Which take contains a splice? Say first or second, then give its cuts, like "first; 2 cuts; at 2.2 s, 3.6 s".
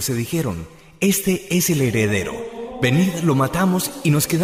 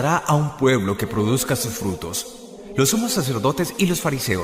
second; 1 cut; at 2.9 s